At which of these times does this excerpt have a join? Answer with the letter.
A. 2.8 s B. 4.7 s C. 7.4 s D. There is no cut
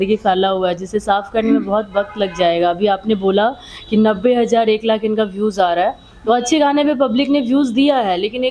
D